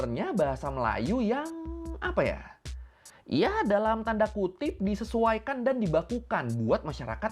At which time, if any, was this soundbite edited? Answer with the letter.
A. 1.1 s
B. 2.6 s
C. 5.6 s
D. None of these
D